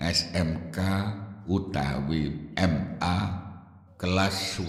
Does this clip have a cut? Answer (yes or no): no